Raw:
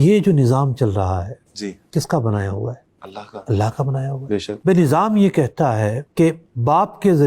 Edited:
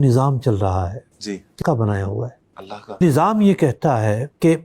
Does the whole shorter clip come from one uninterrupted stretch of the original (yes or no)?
no